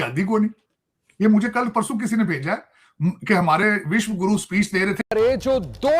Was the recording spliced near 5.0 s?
yes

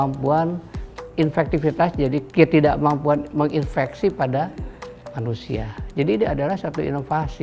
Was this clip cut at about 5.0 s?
no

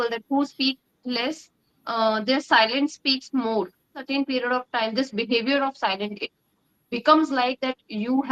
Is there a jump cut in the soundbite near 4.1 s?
yes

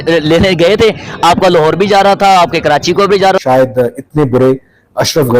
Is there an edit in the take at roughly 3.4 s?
yes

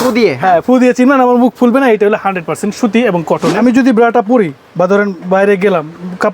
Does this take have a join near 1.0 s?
no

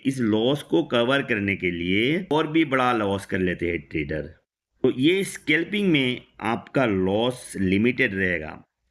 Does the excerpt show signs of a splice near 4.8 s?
yes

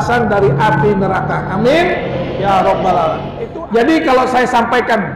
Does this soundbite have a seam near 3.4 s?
yes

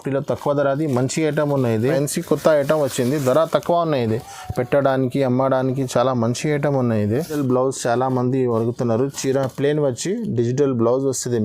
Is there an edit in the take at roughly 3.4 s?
no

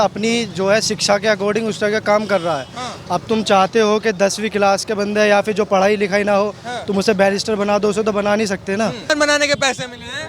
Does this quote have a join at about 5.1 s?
no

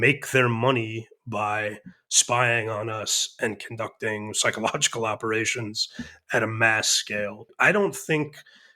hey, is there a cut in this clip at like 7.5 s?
yes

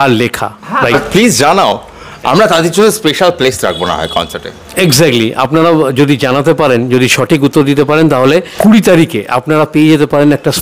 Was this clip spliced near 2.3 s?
no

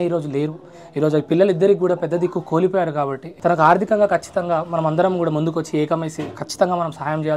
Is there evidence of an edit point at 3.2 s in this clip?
yes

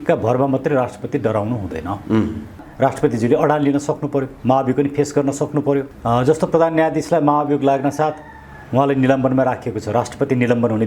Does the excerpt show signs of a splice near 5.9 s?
yes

